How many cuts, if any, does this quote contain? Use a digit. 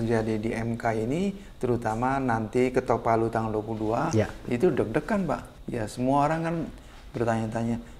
1